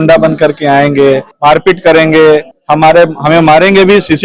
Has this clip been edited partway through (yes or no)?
yes